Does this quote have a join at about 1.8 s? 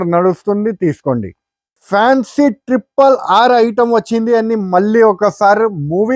yes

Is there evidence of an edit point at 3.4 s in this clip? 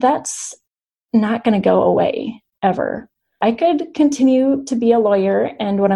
yes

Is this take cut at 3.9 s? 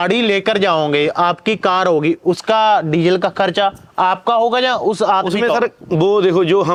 no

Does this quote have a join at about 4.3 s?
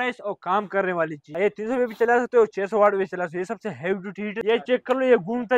yes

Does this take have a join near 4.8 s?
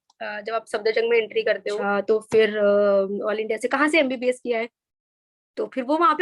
no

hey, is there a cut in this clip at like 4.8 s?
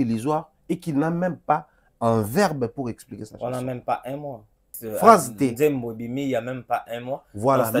yes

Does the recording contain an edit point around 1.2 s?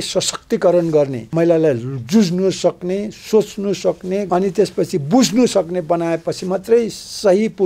yes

